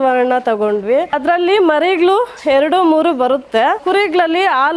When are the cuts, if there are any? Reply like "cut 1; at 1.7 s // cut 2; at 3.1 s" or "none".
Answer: cut 1; at 1.1 s // cut 2; at 3.8 s